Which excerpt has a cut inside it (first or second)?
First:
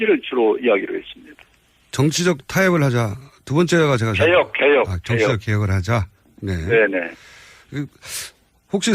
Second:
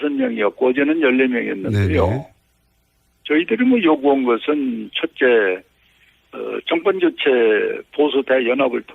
second